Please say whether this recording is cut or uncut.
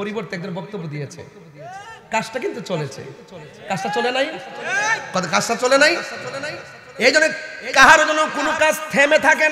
uncut